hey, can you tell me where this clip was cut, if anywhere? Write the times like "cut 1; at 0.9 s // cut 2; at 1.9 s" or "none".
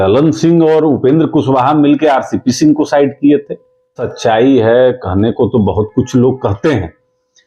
cut 1; at 4.0 s